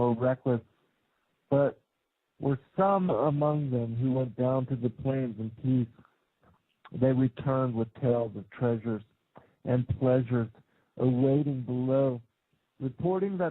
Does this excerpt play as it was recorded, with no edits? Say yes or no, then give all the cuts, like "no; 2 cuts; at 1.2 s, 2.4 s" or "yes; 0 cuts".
no; 1 cut; at 8.8 s